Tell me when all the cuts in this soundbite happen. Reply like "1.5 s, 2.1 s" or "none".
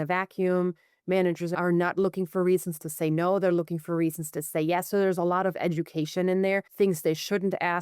1.5 s, 6.7 s

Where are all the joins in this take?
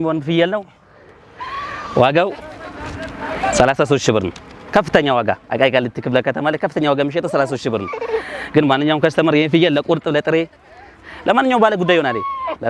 none

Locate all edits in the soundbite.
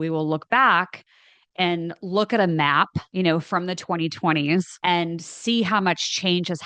3.0 s, 4.7 s

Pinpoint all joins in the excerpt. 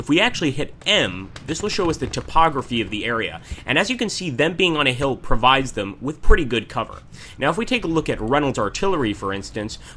none

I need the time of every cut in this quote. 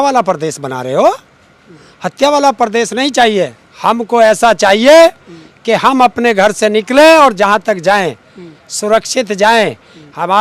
none

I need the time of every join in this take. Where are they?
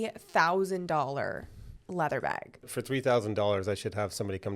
2.6 s

